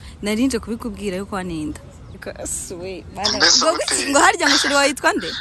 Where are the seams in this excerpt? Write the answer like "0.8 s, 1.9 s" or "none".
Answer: 2.3 s